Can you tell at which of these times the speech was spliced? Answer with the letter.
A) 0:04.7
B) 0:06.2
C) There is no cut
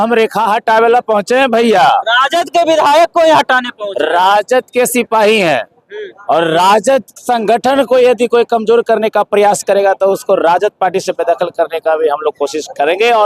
C